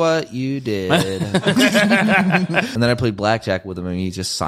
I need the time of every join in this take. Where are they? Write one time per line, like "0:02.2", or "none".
0:02.7